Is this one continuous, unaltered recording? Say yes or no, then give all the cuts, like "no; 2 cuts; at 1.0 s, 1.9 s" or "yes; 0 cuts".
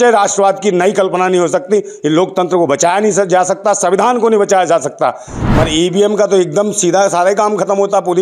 no; 1 cut; at 5.3 s